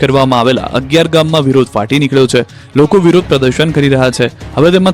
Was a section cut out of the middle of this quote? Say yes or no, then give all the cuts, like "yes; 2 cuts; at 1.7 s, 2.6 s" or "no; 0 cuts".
yes; 1 cut; at 3.1 s